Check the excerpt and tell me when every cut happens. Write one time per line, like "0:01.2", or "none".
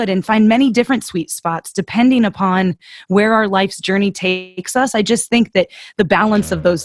none